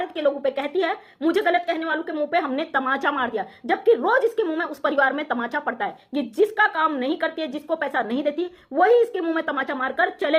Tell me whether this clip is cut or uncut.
uncut